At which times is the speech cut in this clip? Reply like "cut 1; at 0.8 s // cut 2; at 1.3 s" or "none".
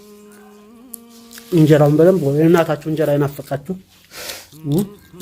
cut 1; at 1.5 s